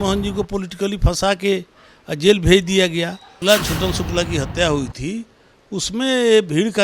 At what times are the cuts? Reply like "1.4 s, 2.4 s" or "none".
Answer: 3.3 s